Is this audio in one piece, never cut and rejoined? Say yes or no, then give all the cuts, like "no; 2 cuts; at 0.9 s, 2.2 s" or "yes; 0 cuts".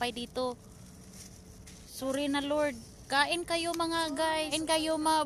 no; 2 cuts; at 1.9 s, 4.5 s